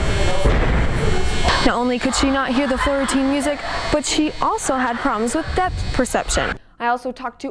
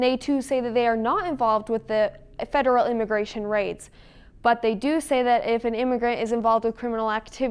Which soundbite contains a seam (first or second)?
first